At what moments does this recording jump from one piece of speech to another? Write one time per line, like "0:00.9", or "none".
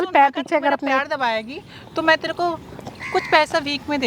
none